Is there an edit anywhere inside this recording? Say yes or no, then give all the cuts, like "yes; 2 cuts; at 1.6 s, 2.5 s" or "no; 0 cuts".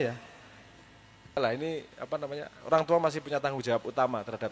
yes; 1 cut; at 1.4 s